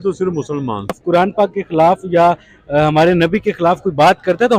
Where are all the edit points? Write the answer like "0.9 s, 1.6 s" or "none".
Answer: 1.0 s